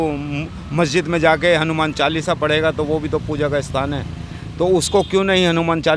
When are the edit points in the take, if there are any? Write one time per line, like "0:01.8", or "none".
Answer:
none